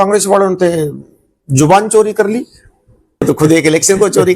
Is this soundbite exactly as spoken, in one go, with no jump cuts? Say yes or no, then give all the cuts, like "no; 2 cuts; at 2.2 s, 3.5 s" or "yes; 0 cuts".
no; 1 cut; at 3.2 s